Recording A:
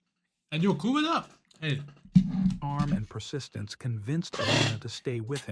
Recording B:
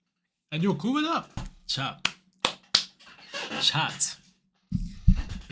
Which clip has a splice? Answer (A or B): B